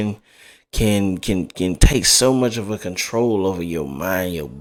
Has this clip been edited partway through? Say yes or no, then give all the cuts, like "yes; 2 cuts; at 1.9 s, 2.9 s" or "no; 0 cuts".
no; 0 cuts